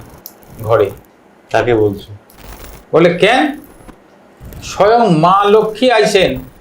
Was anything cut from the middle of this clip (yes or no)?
no